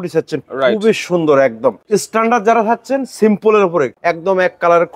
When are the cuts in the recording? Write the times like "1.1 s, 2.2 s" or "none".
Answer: 1.8 s, 3.9 s